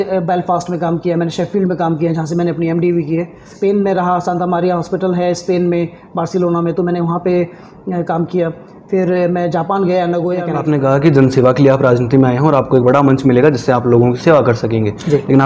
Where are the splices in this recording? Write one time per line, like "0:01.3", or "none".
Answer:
0:03.5
0:10.6

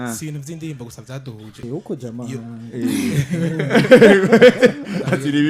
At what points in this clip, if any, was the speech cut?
0:01.6

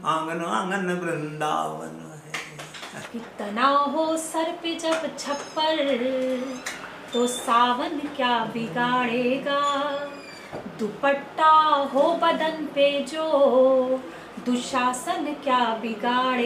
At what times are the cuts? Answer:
0:03.0

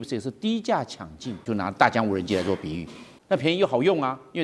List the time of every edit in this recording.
0:01.5
0:03.1

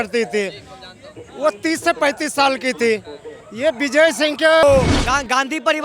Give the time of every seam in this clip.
0:04.6

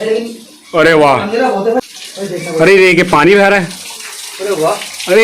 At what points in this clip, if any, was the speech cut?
0:01.8

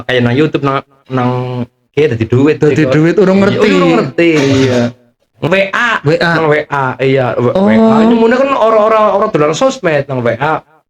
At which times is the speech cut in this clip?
0:05.4

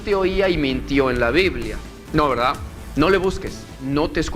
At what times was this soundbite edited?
0:01.9
0:02.7

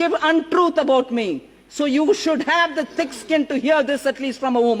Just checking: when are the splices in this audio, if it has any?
none

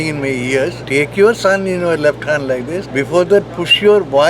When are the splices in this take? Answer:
0:00.8
0:02.9

